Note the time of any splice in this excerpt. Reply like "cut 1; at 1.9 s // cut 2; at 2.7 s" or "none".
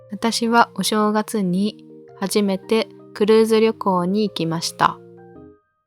cut 1; at 5.0 s